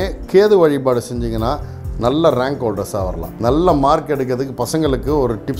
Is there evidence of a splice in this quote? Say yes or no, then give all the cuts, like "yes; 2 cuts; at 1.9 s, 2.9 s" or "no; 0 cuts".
yes; 1 cut; at 3.2 s